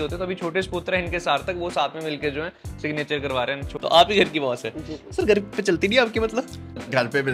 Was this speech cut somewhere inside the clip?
yes; 1 cut; at 3.7 s

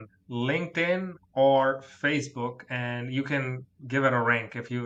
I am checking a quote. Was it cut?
no; 0 cuts

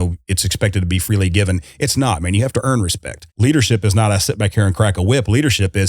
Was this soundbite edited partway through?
yes; 1 cut; at 3.3 s

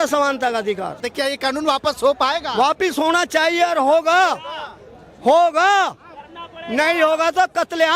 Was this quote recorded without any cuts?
no; 1 cut; at 1.1 s

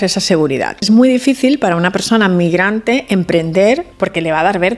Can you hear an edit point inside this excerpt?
yes; 2 cuts; at 0.8 s, 3.9 s

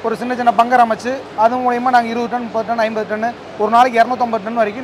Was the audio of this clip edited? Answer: no; 0 cuts

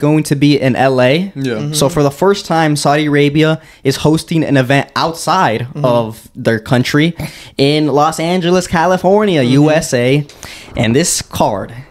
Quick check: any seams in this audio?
no; 0 cuts

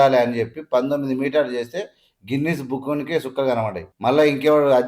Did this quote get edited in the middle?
yes; 1 cut; at 3.9 s

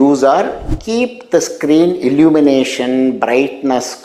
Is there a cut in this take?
no; 0 cuts

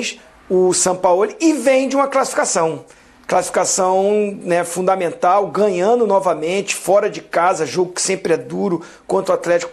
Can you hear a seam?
no; 0 cuts

